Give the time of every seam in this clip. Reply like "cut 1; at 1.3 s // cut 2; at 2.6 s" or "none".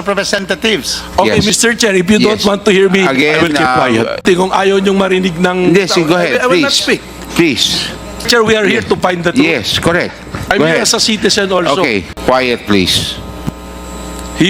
cut 1; at 4.2 s // cut 2; at 8.2 s // cut 3; at 12.1 s